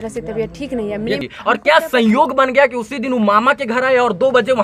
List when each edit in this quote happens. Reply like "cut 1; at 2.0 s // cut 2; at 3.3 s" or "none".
cut 1; at 1.3 s